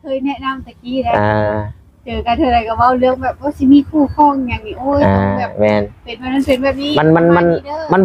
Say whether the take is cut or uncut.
uncut